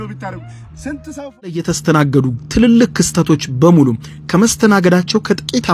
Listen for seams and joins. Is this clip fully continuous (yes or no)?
no